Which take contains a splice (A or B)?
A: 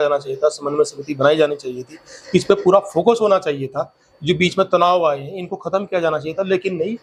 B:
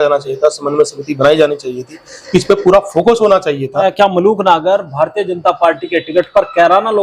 B